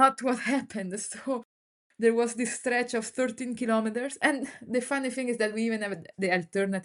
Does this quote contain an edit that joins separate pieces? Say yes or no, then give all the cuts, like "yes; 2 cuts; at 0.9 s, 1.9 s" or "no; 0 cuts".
no; 0 cuts